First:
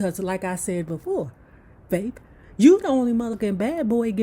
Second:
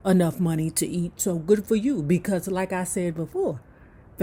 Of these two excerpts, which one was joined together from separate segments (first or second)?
first